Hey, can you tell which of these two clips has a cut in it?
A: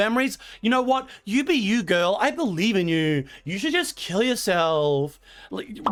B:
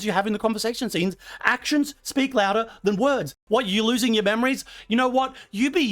B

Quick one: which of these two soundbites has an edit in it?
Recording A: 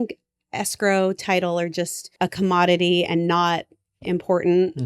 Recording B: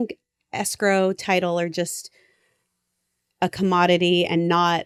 A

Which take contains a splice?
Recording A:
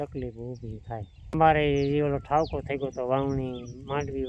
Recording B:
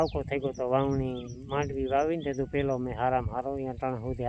A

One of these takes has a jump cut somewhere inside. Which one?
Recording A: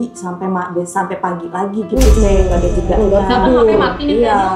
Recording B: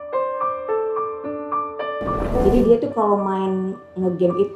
B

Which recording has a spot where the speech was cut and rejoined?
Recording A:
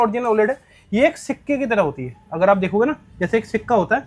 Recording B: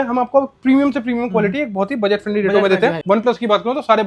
B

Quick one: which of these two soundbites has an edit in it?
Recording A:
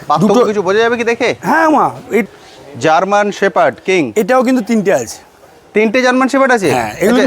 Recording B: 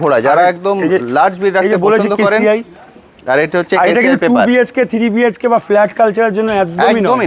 A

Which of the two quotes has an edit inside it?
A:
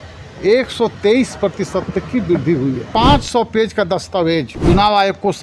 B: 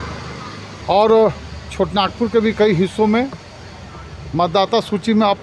A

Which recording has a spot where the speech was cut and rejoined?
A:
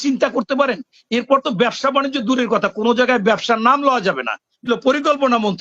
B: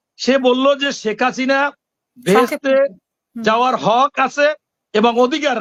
A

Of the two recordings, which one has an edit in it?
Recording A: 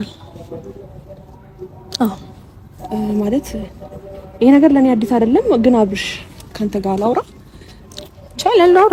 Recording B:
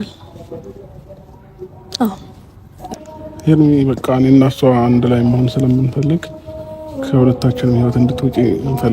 B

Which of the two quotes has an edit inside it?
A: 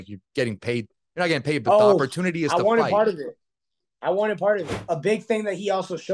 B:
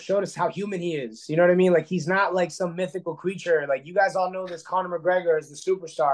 A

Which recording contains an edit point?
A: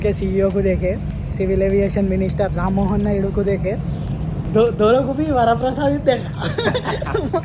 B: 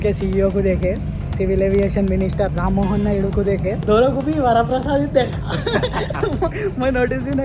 B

